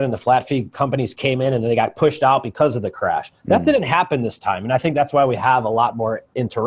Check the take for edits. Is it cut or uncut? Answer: uncut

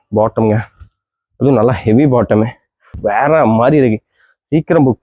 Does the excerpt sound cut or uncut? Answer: cut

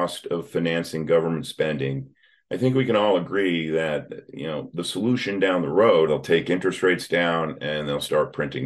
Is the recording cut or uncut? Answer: cut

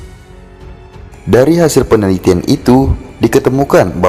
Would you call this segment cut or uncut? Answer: cut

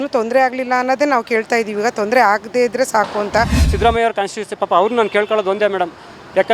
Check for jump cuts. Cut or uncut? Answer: cut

